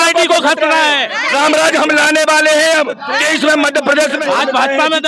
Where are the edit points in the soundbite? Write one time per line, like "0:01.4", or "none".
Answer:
0:01.2
0:04.2